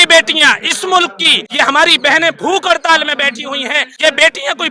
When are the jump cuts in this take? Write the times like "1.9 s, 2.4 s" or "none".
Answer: 1.4 s, 3.9 s

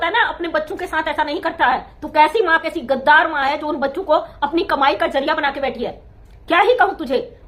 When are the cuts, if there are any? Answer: none

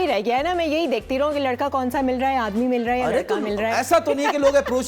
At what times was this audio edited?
none

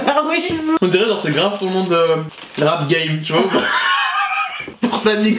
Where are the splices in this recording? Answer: 2.4 s

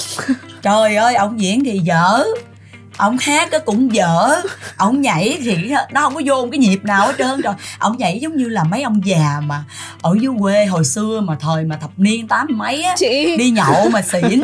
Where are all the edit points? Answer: none

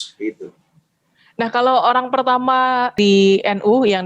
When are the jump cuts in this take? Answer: 2.9 s

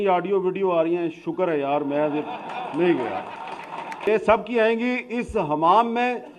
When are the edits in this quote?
4.1 s

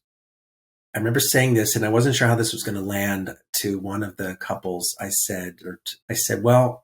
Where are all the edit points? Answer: 5.9 s

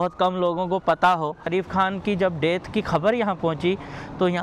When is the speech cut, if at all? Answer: 1.5 s

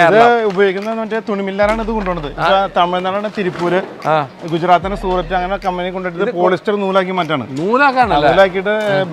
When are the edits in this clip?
none

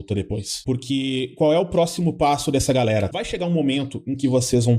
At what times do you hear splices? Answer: 1.7 s

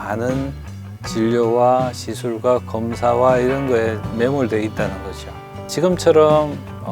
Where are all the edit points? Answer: 5.5 s

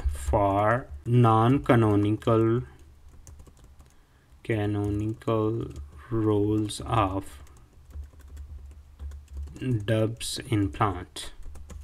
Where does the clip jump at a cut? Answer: 1.0 s

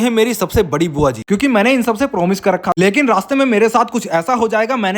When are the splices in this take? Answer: 1.2 s, 2.7 s

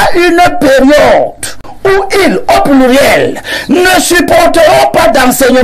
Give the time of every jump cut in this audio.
none

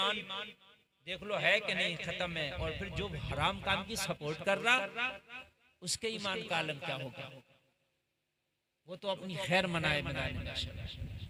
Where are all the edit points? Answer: none

